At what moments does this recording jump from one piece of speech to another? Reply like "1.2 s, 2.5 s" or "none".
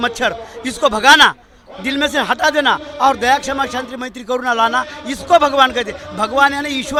none